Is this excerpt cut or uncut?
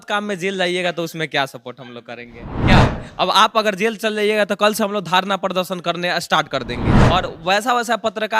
cut